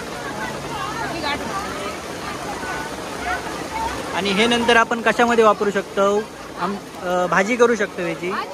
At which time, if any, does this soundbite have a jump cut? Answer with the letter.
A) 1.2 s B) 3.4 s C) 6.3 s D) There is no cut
D